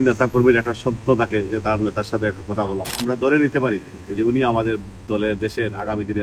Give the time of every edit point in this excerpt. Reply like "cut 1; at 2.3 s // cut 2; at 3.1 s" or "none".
cut 1; at 2.9 s